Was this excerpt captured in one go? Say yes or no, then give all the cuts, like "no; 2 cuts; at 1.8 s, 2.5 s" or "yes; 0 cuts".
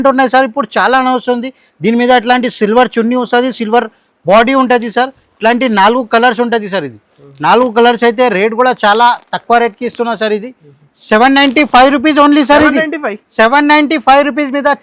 yes; 0 cuts